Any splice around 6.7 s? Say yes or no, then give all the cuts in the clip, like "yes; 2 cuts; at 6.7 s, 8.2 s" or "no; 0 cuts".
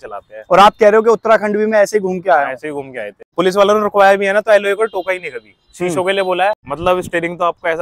yes; 2 cuts; at 3.3 s, 6.7 s